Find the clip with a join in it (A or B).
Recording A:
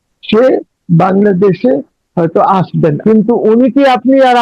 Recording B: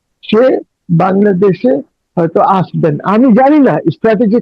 A